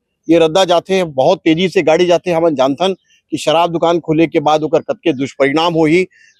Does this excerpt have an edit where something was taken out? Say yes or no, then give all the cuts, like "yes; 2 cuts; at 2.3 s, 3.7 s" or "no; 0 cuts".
no; 0 cuts